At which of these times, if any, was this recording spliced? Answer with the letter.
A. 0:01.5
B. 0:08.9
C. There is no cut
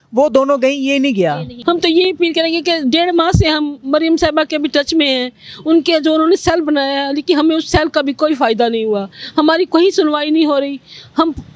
A